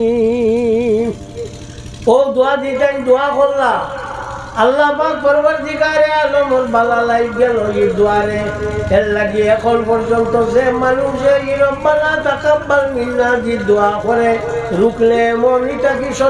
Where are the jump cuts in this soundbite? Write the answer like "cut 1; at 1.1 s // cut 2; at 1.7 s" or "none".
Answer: none

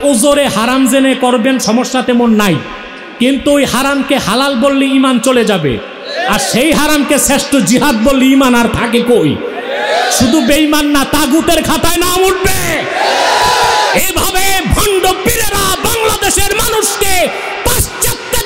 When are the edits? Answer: none

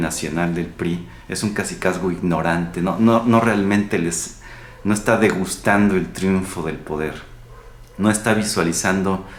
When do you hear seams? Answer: none

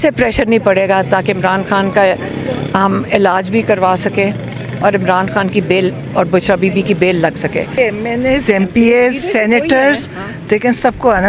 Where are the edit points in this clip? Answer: cut 1; at 7.8 s

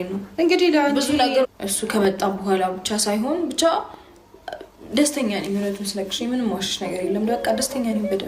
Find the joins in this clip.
cut 1; at 1.4 s

